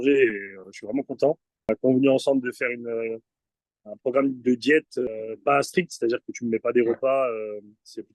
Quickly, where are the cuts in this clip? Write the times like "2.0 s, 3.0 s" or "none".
1.7 s, 5.1 s